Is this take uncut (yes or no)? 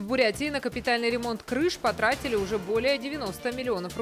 yes